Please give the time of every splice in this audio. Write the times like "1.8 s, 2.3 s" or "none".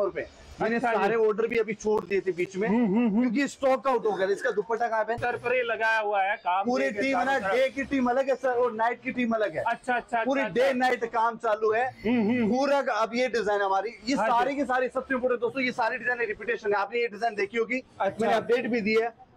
5.2 s